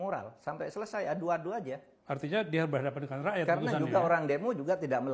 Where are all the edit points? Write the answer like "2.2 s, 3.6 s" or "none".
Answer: 1.9 s